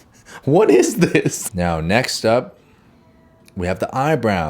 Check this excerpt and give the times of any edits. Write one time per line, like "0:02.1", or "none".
0:01.4